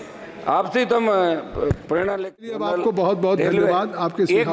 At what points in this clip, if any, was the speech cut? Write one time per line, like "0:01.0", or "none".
0:02.4